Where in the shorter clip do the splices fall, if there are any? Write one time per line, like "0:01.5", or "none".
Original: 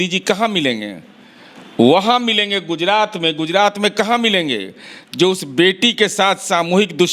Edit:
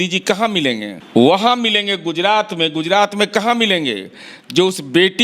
0:00.9